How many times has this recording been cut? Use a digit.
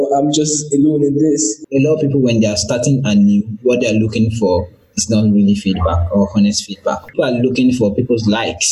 2